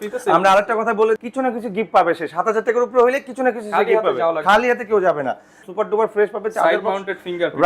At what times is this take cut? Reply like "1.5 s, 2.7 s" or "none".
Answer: 1.2 s, 5.6 s